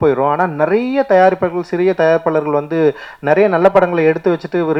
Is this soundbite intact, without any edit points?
yes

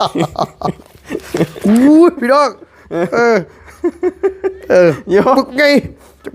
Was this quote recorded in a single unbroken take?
yes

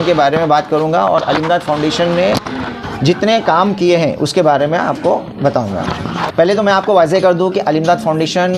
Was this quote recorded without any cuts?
no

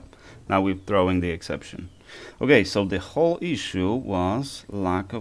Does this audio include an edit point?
no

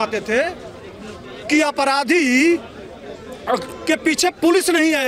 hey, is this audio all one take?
yes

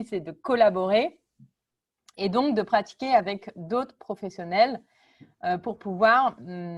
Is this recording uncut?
yes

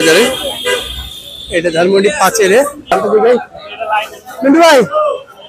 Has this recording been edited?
yes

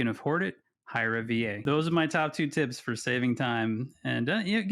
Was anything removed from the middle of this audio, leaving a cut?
yes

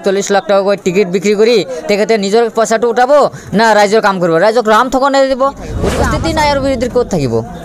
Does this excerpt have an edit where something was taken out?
yes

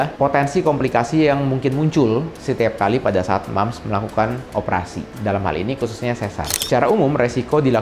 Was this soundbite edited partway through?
yes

